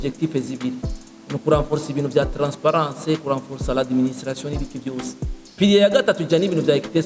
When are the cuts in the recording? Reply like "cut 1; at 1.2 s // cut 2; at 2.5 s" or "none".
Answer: none